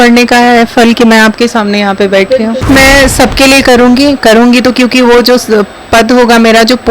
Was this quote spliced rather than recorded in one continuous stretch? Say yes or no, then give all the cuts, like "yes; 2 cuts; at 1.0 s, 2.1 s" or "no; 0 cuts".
yes; 1 cut; at 2.6 s